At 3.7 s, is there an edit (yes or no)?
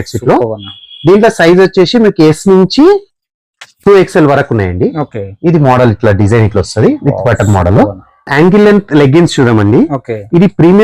no